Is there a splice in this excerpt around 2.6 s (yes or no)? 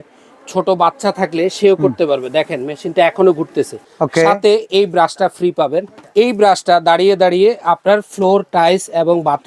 no